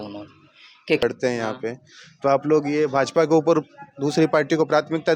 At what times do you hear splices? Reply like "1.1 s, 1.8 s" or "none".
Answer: 1.0 s